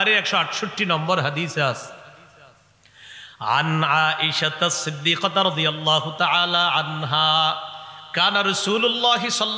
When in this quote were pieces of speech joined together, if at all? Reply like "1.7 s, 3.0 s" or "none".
none